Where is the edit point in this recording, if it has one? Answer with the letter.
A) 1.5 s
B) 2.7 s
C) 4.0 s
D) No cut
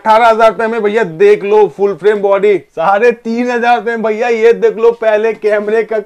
B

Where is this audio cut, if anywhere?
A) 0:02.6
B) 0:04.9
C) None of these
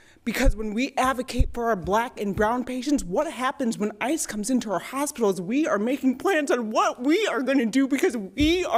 C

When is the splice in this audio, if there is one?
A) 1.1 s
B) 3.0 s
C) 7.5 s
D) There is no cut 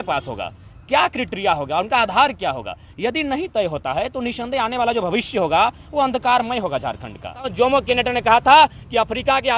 C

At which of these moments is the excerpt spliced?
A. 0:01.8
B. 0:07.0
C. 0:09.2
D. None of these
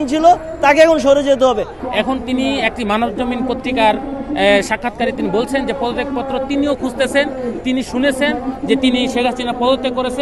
A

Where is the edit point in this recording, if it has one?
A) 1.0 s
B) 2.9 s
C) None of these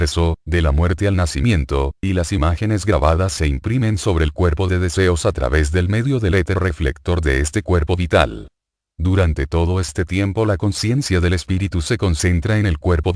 C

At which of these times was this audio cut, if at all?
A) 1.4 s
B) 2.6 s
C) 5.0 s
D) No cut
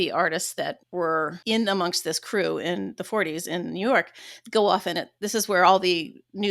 A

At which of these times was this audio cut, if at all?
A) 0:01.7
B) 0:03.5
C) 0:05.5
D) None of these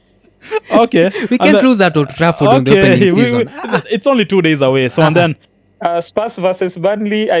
C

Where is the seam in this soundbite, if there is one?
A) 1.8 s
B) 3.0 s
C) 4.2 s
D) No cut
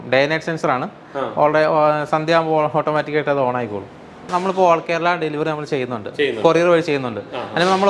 C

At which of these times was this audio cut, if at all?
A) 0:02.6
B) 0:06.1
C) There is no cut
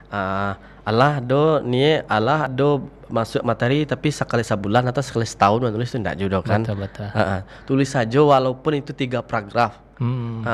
C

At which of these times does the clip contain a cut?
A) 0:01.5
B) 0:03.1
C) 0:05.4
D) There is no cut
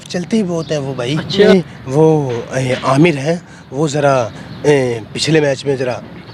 A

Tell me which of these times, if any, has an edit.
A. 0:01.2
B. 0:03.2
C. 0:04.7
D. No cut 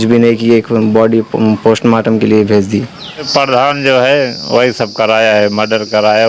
B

